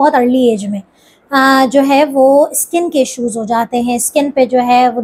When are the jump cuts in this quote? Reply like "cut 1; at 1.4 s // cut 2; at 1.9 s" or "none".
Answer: none